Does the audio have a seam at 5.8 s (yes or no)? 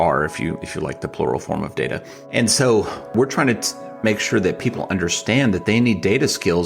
no